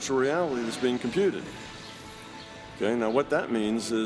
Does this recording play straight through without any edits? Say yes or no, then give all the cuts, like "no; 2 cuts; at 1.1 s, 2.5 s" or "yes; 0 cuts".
yes; 0 cuts